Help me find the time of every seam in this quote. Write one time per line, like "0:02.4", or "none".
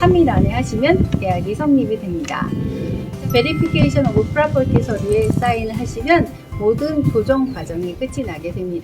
0:03.1